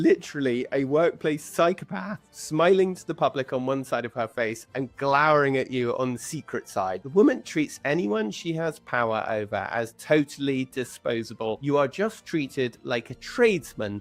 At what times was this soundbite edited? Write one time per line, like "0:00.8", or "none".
none